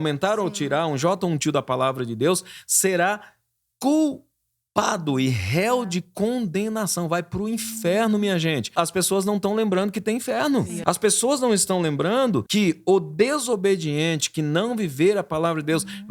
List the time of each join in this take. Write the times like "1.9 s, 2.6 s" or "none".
8.7 s, 10.7 s, 12.5 s